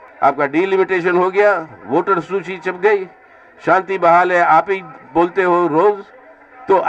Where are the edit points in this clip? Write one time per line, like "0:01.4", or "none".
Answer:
none